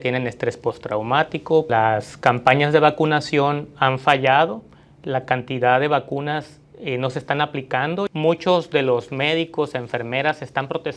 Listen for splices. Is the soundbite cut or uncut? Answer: cut